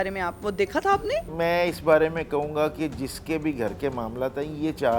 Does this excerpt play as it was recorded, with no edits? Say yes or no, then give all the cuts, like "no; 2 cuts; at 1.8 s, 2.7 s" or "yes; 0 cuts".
no; 1 cut; at 1.3 s